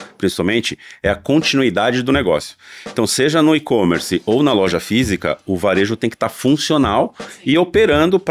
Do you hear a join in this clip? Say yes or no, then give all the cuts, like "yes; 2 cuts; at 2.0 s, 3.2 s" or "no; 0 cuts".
no; 0 cuts